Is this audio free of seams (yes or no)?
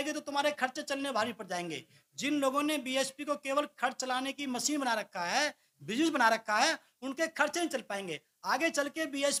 yes